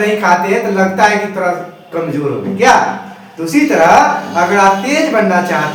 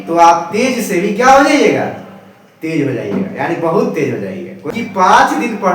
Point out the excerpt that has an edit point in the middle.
second; 1 cut; at 4.6 s

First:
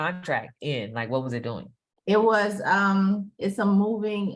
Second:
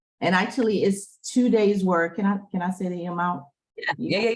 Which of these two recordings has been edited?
first; 1 cut; at 3.3 s

